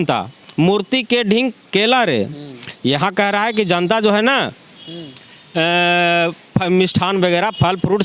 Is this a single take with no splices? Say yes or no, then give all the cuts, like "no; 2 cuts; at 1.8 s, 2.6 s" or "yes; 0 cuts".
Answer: yes; 0 cuts